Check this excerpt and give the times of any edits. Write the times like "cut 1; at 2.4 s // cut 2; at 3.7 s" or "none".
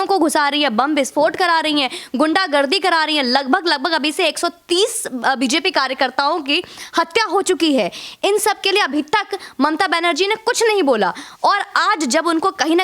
none